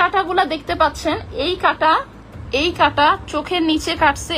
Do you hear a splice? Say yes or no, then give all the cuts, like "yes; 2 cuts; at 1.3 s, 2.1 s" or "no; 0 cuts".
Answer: no; 0 cuts